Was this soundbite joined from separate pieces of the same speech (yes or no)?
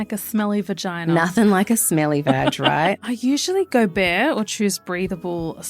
yes